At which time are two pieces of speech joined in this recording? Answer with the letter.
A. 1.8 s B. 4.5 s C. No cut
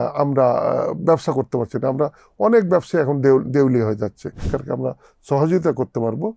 B